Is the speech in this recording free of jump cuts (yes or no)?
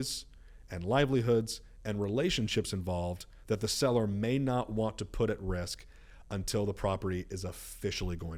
yes